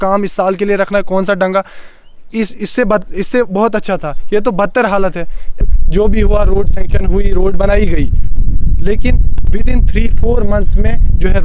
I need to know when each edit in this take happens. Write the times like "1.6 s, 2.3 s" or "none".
5.6 s